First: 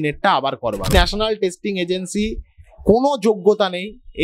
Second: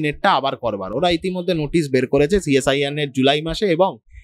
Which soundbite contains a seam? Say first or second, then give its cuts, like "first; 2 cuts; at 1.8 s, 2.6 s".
first; 1 cut; at 0.9 s